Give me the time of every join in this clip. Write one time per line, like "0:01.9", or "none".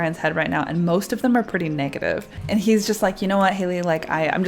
0:02.4